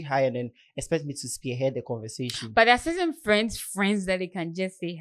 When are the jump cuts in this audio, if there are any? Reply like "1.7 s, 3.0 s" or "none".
none